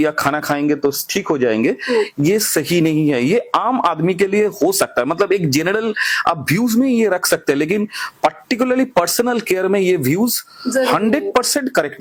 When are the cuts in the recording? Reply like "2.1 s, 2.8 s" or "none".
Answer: none

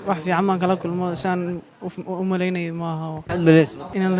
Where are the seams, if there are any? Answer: 3.2 s

